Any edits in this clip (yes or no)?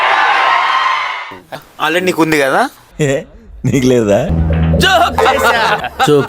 yes